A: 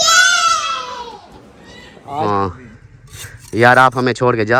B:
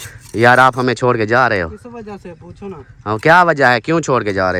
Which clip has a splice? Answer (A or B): A